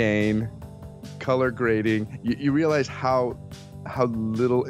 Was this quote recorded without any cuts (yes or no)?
no